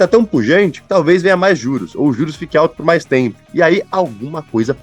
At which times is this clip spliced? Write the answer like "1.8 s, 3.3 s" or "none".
3.4 s